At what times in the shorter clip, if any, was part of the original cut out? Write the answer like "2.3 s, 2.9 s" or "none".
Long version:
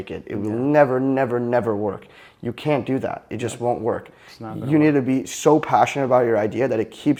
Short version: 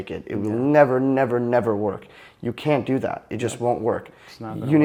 none